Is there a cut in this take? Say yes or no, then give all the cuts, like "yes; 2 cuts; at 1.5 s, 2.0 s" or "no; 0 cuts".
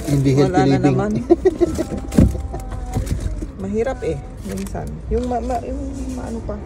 no; 0 cuts